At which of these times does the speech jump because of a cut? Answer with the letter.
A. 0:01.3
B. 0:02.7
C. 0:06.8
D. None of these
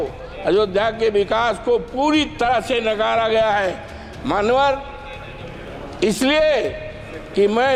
D